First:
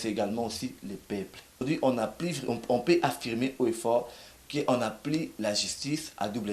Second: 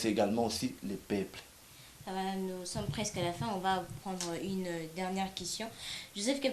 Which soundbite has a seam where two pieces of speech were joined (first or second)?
first